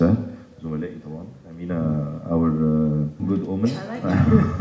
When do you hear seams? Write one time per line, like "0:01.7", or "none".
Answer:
0:03.2